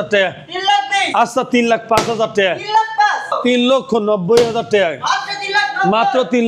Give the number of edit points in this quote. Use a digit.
1